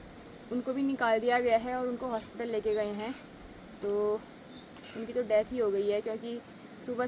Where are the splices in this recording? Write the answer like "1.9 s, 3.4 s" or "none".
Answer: none